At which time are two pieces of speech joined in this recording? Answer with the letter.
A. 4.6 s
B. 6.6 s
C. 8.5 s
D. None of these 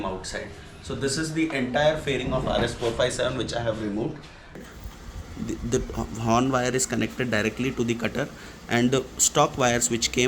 A